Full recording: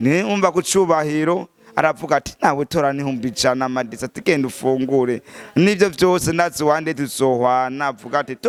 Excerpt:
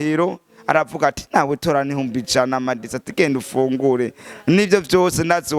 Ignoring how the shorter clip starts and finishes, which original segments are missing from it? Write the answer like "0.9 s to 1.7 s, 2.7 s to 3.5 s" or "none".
none